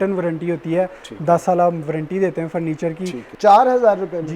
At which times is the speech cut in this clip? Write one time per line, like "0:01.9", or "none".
0:03.2